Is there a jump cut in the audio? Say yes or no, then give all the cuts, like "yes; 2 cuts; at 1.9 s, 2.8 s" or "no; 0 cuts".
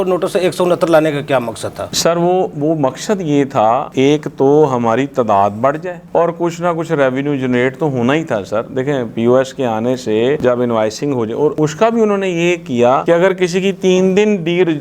no; 0 cuts